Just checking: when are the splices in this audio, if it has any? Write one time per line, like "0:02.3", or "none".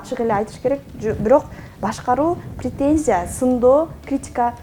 none